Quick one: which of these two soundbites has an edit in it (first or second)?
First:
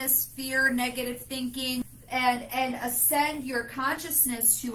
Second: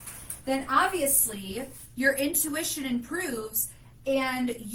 first